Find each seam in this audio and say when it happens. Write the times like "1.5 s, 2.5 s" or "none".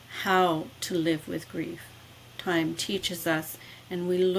none